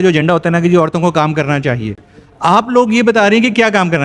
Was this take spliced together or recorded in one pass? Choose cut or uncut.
uncut